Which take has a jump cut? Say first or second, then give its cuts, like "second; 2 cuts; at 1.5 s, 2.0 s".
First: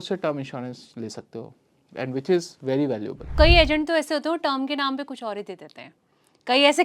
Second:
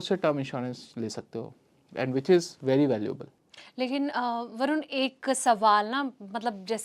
first; 1 cut; at 3.3 s